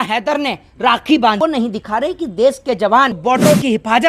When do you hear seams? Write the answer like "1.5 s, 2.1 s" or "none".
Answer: 1.4 s, 3.2 s